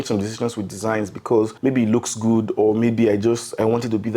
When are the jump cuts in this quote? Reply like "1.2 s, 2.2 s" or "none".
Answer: 1.5 s